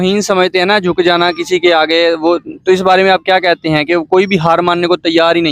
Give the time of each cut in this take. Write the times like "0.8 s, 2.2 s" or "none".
none